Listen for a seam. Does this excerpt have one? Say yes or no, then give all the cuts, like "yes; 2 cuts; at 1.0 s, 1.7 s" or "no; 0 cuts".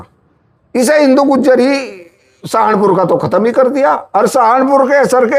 no; 0 cuts